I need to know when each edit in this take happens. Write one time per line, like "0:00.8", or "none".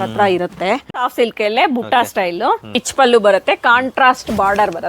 0:00.9
0:02.8